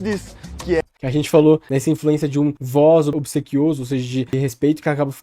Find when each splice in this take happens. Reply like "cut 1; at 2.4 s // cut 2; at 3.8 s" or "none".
cut 1; at 2.6 s // cut 2; at 3.1 s // cut 3; at 4.3 s